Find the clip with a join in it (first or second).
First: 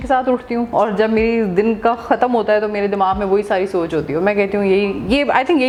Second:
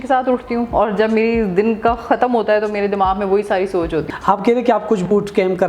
second